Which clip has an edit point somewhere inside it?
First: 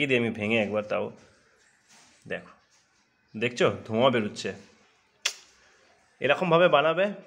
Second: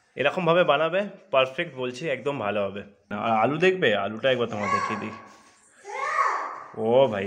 second; 1 cut; at 3.1 s

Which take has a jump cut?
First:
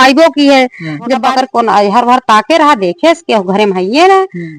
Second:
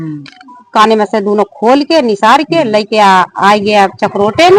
first; 1 cut; at 1.2 s

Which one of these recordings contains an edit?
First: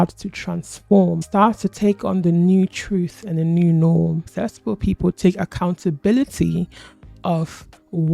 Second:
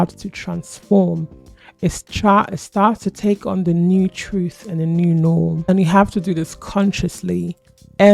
first; 2 cuts; at 1.2 s, 4.2 s

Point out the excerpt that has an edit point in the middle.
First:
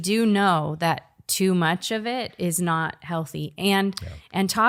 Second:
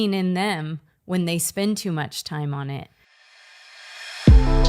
second; 1 cut; at 3.3 s

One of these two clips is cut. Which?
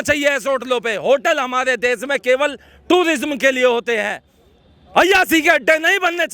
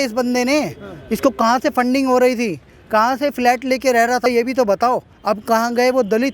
second; 2 cuts; at 4.3 s, 5.1 s

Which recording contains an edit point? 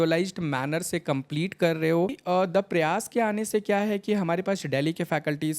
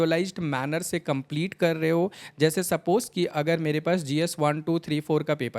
first; 1 cut; at 2.2 s

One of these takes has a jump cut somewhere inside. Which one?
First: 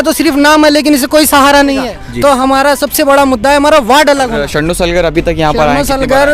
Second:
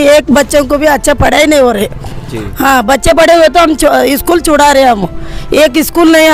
first; 2 cuts; at 1.9 s, 4.4 s

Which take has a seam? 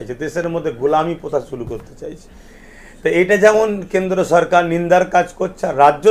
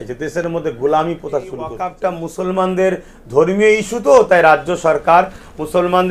second; 1 cut; at 1.9 s

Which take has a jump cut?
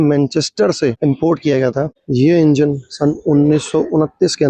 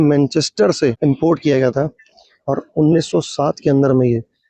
first; 1 cut; at 2.0 s

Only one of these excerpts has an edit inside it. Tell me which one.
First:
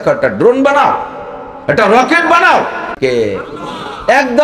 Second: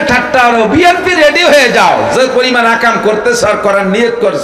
first; 1 cut; at 2.9 s

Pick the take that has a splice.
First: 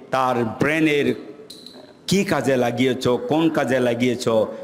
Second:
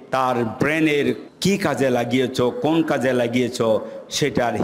second; 1 cut; at 1.3 s

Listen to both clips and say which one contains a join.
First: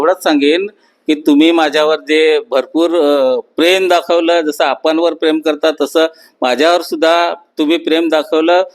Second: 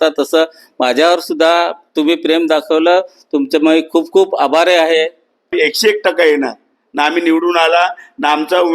second; 1 cut; at 5.5 s

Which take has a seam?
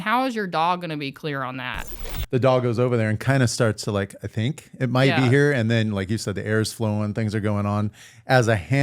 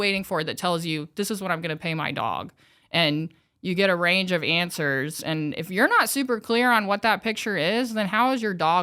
first; 1 cut; at 2.1 s

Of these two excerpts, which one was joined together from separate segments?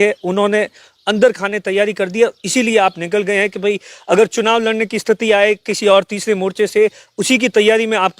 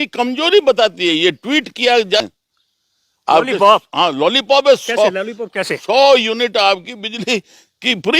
second; 1 cut; at 2.2 s

